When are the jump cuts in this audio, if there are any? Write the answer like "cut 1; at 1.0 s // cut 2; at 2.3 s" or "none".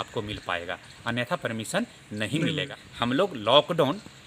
cut 1; at 2.7 s